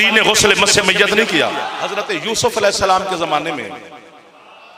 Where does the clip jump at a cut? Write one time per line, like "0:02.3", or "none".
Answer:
0:01.7

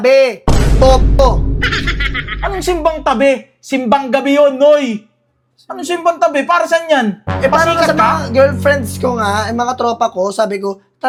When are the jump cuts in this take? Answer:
none

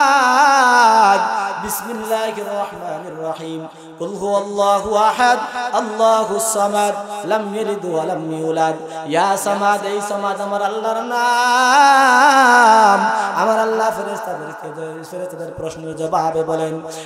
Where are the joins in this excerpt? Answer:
none

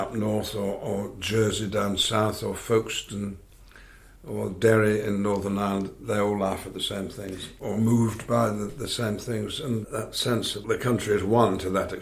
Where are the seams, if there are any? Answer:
0:07.5
0:09.8

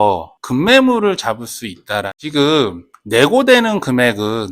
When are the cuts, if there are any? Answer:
0:02.2

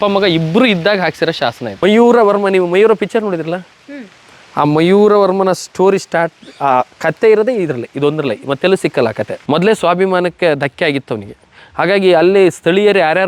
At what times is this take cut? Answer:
0:01.8
0:09.4

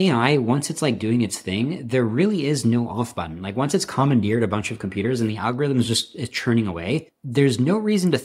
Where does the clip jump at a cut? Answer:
0:07.2

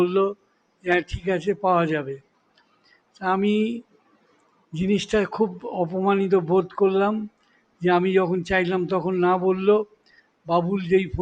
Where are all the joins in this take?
none

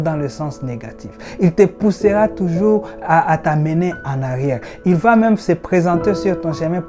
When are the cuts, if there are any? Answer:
none

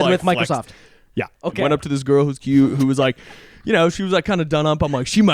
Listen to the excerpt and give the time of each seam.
0:01.5

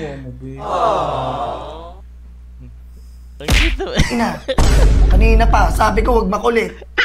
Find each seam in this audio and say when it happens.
none

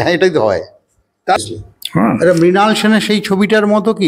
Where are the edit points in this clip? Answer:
0:01.4

